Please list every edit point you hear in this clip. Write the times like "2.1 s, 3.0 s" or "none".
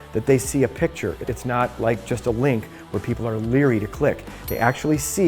1.3 s

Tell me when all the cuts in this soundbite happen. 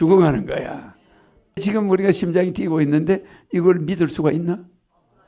1.6 s

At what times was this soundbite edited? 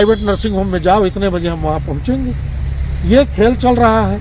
none

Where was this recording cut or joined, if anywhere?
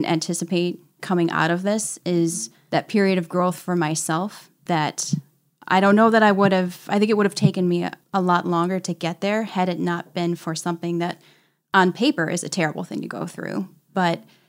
0.9 s, 2.5 s, 8.0 s

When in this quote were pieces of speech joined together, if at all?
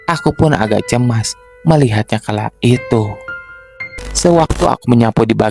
4.1 s

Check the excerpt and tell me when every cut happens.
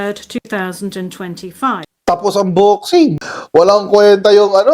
1.8 s, 3.3 s

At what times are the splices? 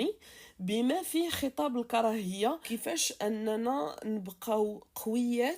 2.6 s

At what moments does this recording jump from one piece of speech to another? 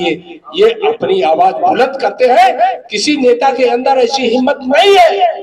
2.9 s

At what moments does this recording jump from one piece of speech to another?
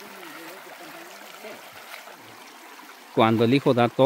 2.3 s

